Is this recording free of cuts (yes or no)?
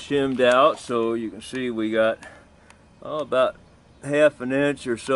yes